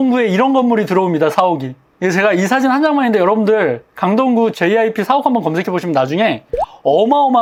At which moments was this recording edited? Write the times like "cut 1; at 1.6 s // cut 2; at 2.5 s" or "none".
none